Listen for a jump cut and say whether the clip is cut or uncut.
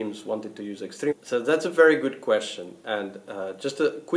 uncut